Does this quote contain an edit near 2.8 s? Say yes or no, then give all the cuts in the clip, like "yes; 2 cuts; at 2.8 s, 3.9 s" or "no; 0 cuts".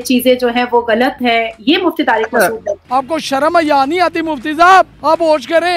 yes; 1 cut; at 2.8 s